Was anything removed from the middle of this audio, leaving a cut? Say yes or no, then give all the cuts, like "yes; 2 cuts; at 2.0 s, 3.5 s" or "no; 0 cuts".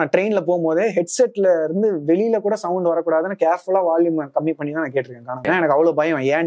yes; 1 cut; at 5.4 s